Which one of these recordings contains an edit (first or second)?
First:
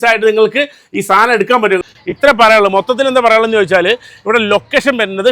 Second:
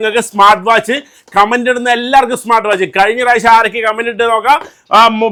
first